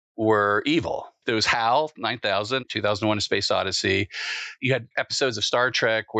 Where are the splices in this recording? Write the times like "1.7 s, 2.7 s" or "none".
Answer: 2.6 s, 4.6 s